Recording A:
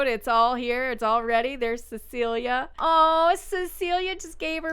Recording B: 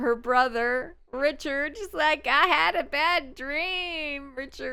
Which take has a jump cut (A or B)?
A